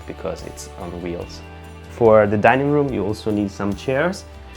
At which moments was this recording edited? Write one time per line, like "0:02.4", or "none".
0:01.9